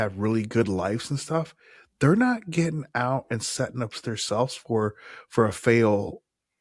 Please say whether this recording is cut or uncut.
uncut